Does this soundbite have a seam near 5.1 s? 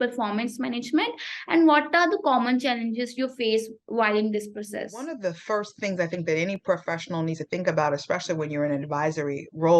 yes; 1 cut; at 5.1 s

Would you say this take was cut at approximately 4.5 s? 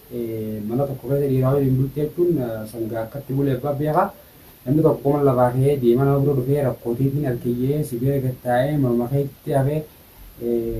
yes; 1 cut; at 4.5 s

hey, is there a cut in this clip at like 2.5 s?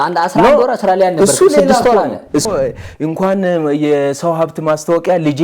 yes; 1 cut; at 2.5 s

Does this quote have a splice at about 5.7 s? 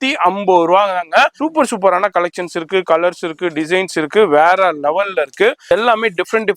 yes; 2 cuts; at 1.4 s, 5.7 s

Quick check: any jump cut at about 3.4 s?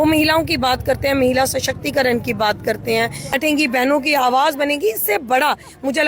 yes; 1 cut; at 3.4 s

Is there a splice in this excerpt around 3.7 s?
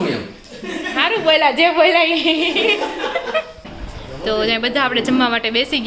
yes; 1 cut; at 3.7 s

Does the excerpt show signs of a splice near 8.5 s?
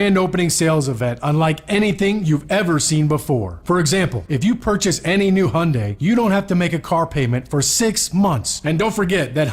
yes; 2 cuts; at 4.2 s, 8.5 s

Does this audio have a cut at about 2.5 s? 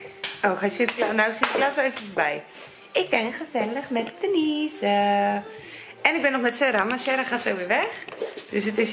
no; 0 cuts

